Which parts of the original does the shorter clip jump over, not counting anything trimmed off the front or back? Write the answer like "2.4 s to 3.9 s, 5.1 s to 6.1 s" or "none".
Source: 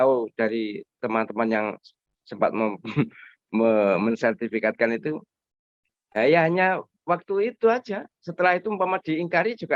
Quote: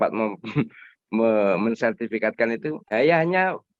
5.2 s to 6.1 s